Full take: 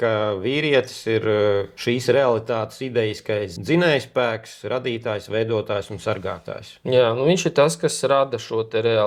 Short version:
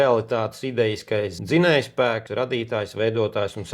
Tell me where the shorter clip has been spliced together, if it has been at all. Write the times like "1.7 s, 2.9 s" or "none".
2.2 s